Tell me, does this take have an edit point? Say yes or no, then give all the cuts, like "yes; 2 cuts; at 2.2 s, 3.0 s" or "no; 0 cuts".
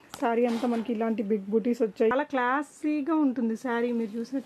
yes; 1 cut; at 2.1 s